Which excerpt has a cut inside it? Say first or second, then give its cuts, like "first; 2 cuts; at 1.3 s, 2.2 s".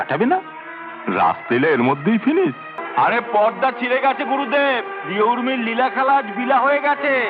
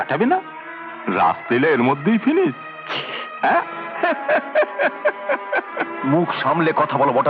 first; 1 cut; at 2.7 s